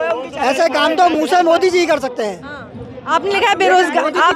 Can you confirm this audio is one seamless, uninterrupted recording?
yes; 0 cuts

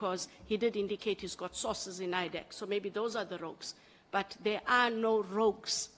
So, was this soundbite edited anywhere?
no; 0 cuts

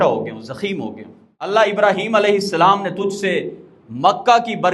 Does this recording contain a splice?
yes; 1 cut; at 1.5 s

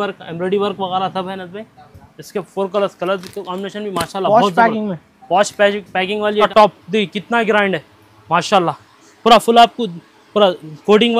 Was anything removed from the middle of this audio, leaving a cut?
yes; 1 cut; at 6.4 s

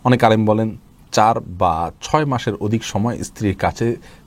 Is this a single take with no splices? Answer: yes; 0 cuts

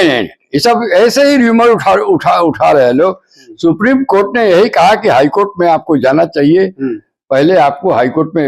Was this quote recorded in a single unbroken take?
yes; 0 cuts

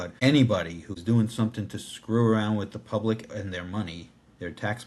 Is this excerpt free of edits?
no; 1 cut; at 0.9 s

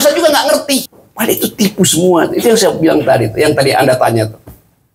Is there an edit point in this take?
yes; 1 cut; at 1.0 s

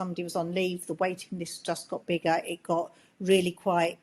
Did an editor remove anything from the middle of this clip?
no; 0 cuts

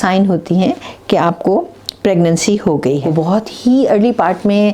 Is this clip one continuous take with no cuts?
no; 1 cut; at 3.0 s

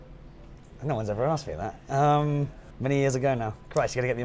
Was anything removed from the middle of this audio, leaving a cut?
yes; 1 cut; at 2.6 s

